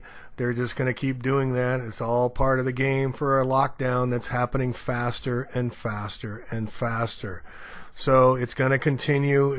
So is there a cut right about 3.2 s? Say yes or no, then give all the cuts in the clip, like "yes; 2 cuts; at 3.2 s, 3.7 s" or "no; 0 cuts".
yes; 1 cut; at 3.2 s